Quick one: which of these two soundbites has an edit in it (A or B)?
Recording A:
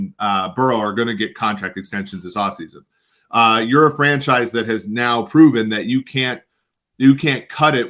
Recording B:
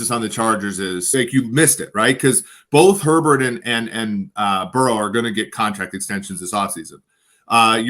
B